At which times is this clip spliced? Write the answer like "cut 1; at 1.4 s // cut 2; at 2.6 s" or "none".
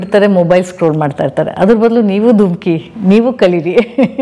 none